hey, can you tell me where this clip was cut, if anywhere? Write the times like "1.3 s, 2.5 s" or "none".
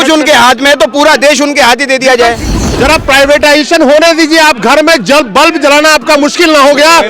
2.6 s